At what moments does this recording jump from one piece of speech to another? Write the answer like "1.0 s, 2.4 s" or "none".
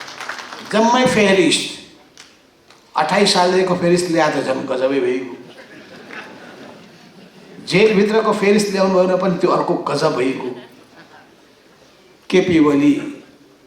11.7 s

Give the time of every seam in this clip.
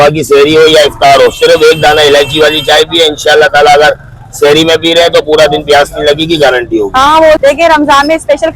7.4 s

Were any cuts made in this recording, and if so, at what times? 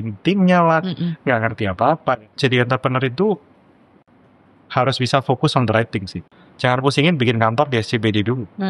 2.3 s, 6.4 s

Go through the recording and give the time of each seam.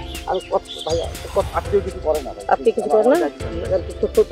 1.5 s

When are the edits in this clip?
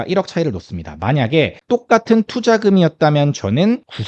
1.6 s

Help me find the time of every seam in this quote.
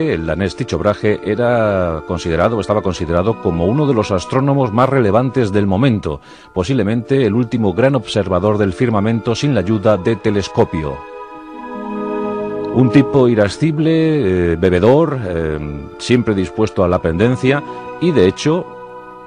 12.7 s

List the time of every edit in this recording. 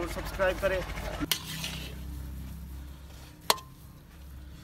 1.3 s

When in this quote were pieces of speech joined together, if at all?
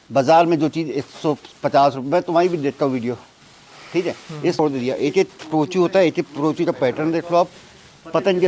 4.6 s

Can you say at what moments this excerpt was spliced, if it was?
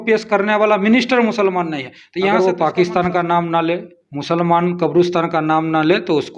2.4 s

